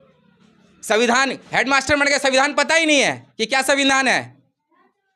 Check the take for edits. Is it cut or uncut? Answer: uncut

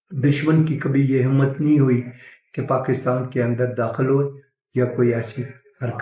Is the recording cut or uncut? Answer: uncut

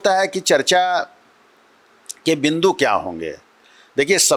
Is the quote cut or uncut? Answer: uncut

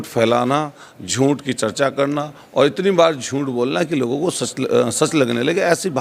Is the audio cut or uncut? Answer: uncut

